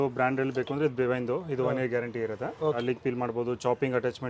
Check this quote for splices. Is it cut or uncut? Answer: cut